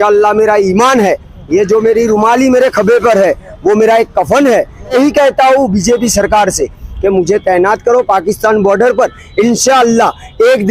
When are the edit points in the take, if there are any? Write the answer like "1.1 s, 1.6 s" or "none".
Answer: 4.9 s